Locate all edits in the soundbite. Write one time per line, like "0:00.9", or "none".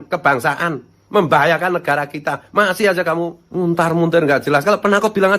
0:03.4